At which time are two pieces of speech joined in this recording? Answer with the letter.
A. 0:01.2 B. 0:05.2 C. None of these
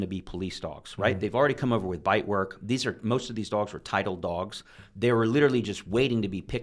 C